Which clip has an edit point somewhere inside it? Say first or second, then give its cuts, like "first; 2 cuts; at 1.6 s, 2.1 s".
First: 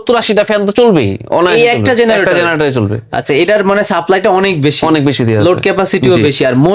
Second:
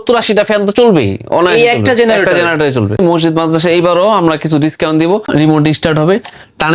second; 2 cuts; at 3.0 s, 5.3 s